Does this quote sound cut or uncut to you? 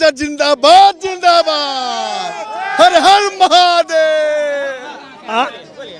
uncut